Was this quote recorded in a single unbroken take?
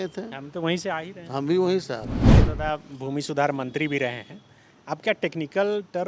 no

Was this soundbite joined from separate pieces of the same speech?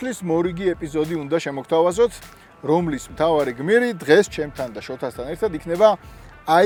no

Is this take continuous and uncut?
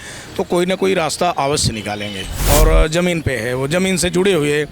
no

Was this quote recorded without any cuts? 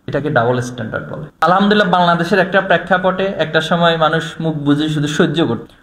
no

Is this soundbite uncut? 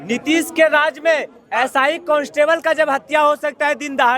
yes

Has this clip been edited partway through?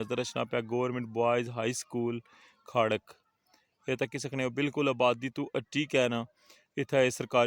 no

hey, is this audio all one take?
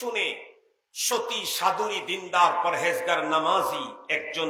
yes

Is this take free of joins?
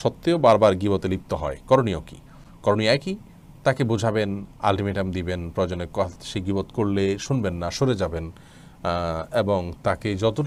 yes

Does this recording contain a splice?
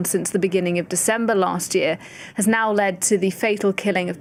no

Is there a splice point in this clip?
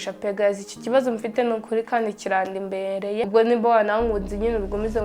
yes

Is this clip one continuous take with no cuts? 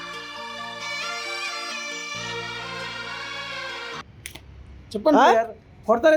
no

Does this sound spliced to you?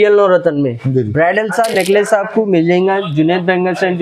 no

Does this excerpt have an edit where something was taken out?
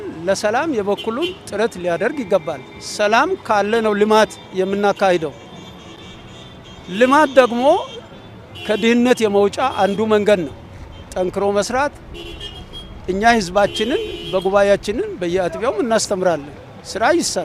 no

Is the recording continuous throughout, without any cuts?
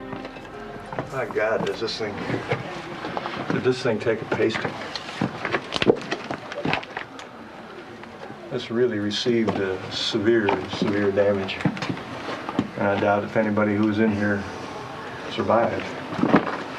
no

